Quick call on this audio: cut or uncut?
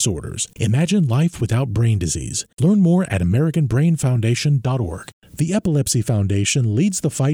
cut